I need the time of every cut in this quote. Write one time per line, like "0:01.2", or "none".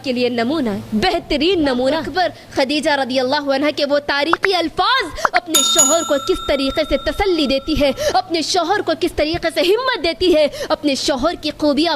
0:02.1